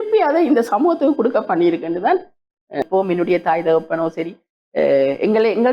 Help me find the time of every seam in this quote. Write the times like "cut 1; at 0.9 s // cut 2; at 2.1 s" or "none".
cut 1; at 2.9 s